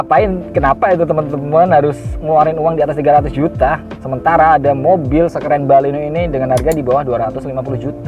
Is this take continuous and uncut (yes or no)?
yes